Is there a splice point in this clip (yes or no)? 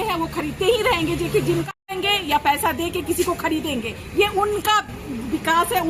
yes